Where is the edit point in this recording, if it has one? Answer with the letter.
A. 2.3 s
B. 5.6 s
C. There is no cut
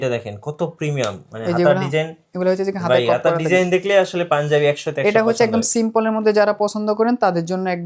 C